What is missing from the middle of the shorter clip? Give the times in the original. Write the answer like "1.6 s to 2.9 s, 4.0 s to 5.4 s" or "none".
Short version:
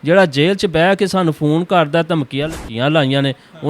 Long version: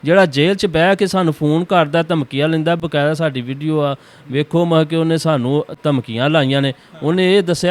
2.6 s to 6.0 s